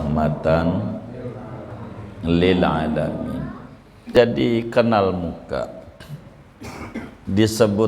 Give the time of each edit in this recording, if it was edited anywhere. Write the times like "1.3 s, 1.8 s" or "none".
4.1 s

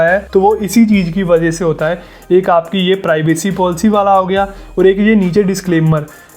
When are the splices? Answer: none

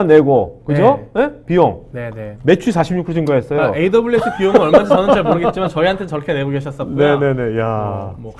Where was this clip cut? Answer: none

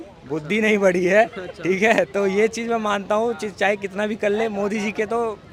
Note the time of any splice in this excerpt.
none

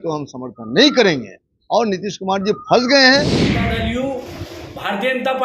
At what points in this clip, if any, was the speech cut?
3.5 s

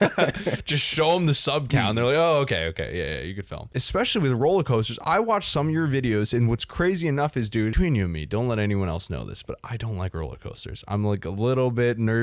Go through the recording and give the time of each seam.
3.7 s, 7.7 s

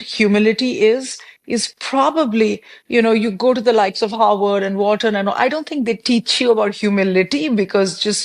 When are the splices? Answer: none

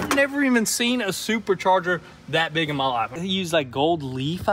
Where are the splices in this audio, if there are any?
3.2 s

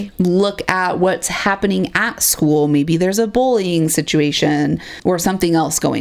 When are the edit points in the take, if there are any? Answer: 5.0 s

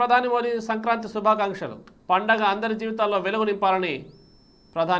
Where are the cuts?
none

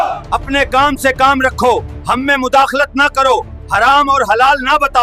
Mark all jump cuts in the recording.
none

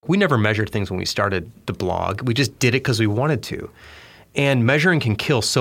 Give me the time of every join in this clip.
1.5 s

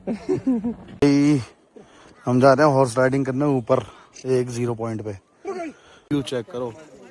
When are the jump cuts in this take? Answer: 1.0 s, 6.1 s

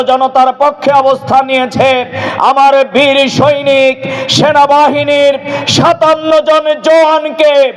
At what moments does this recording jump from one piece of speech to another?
none

